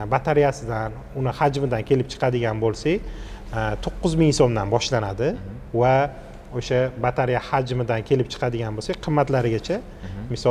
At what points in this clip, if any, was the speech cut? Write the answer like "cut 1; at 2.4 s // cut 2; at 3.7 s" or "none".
none